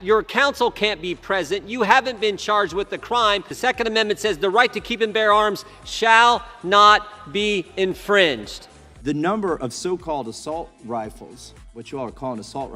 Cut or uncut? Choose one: cut